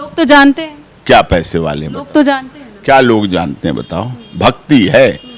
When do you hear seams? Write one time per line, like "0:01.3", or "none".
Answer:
none